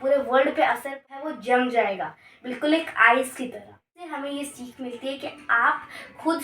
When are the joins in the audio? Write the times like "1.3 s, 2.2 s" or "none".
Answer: 1.0 s, 4.1 s